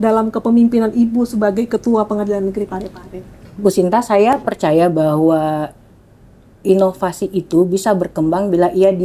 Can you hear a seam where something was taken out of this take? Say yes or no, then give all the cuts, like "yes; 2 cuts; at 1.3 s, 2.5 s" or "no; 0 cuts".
no; 0 cuts